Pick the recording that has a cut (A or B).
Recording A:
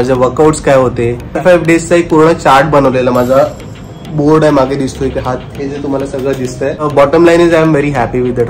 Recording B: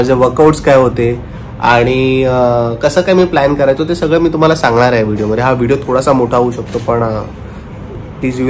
A